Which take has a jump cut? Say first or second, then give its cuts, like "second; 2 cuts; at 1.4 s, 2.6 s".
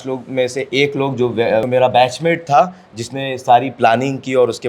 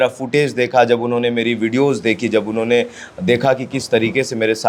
first; 1 cut; at 1.7 s